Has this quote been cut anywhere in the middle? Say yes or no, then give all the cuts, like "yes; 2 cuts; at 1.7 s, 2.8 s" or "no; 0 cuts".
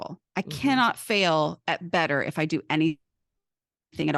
no; 0 cuts